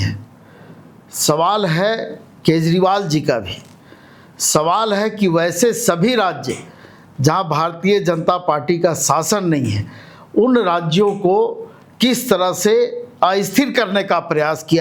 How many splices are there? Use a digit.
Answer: 0